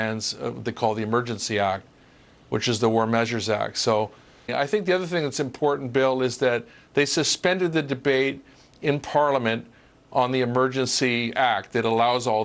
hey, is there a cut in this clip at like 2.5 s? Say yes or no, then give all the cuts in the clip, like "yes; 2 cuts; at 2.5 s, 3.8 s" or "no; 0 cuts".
no; 1 cut; at 4.5 s